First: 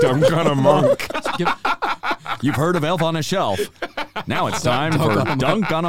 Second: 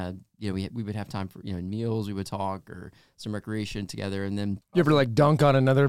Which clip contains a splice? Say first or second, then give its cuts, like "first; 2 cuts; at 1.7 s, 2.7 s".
second; 1 cut; at 4.6 s